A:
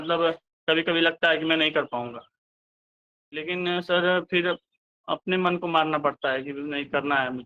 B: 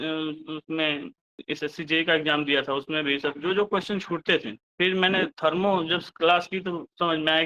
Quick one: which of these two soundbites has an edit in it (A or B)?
B